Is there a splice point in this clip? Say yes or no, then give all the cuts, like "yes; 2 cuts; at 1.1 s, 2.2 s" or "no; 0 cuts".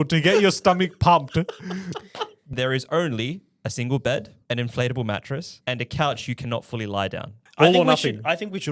yes; 4 cuts; at 2.5 s, 4.3 s, 5.5 s, 7.4 s